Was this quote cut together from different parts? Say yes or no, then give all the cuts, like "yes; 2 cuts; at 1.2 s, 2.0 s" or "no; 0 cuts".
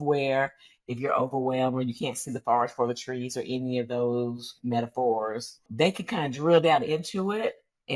yes; 1 cut; at 5.6 s